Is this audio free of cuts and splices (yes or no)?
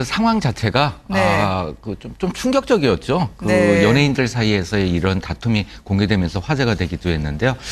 yes